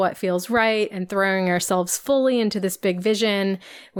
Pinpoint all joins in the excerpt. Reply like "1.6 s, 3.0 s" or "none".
none

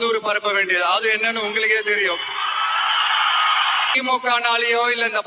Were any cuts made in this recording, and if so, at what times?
3.9 s

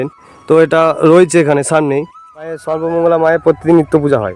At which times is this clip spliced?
2.7 s

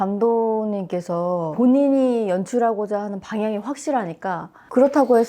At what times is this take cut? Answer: 1.5 s

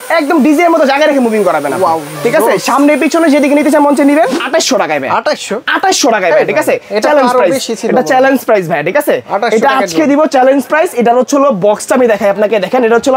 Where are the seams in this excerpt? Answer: 4.4 s

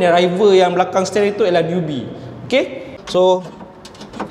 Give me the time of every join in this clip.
2.9 s

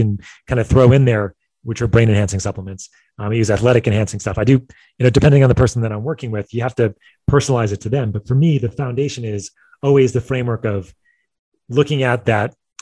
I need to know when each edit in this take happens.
none

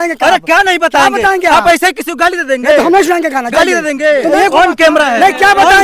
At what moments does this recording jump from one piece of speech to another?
4.3 s

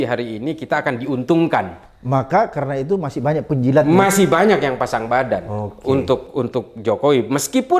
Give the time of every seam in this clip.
none

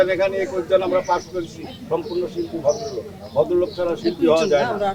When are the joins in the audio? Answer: none

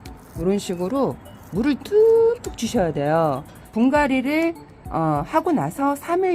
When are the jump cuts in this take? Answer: 3.6 s

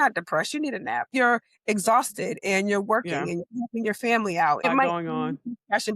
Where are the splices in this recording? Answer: 1.1 s, 4.7 s

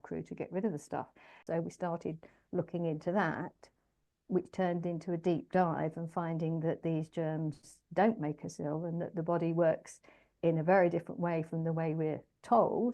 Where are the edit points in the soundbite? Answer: 1.3 s

